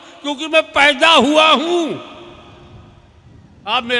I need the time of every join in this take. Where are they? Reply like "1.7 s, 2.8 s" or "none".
none